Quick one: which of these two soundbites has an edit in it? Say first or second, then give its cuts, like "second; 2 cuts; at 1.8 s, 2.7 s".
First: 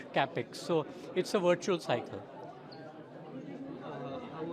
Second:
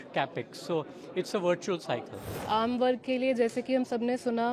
second; 1 cut; at 2.3 s